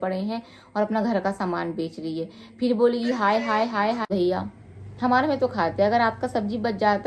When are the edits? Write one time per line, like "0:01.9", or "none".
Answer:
0:04.1